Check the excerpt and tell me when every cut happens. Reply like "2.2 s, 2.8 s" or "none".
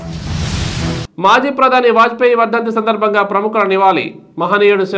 none